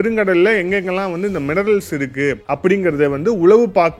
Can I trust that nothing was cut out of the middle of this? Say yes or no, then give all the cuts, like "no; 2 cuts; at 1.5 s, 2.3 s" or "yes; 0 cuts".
no; 1 cut; at 2.5 s